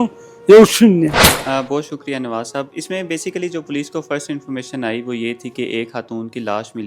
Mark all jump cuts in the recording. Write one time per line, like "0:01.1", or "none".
0:01.3